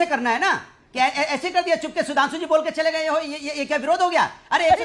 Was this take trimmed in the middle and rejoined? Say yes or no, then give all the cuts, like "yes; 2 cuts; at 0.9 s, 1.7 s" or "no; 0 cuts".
no; 0 cuts